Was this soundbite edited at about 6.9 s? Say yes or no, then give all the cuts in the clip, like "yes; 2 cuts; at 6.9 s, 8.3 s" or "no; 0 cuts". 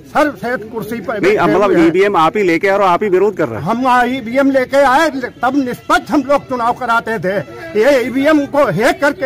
no; 0 cuts